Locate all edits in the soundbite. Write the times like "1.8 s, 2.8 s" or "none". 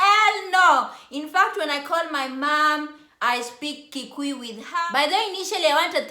4.7 s